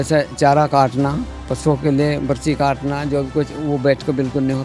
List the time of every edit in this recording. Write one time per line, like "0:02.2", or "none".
0:01.3